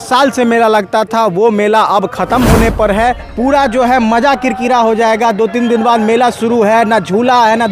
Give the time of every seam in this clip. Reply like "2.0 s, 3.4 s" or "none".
3.3 s